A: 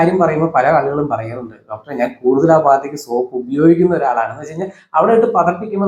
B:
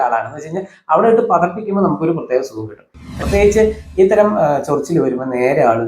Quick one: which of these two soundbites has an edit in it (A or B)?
B